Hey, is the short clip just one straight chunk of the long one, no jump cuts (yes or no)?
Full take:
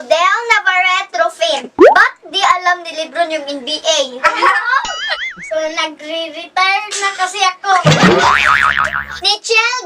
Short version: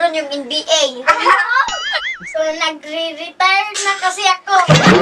yes